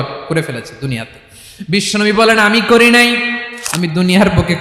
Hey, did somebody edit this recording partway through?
yes; 1 cut; at 3.4 s

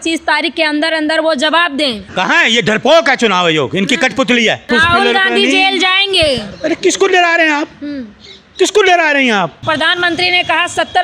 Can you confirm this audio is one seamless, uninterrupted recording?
no; 3 cuts; at 2.0 s, 4.6 s, 9.6 s

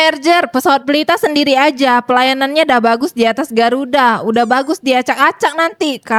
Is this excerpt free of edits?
yes; 0 cuts

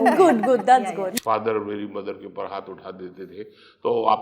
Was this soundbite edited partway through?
yes; 1 cut; at 1.1 s

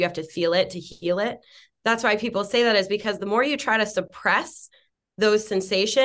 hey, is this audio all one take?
yes; 0 cuts

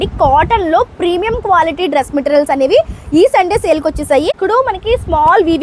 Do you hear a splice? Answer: yes; 1 cut; at 4.3 s

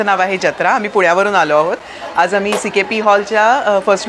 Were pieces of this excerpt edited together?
no; 0 cuts

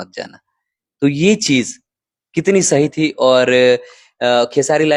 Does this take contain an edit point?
no; 0 cuts

